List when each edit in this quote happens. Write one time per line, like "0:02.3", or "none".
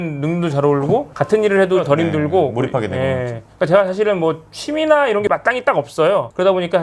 none